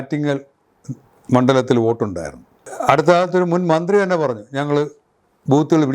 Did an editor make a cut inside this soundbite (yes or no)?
yes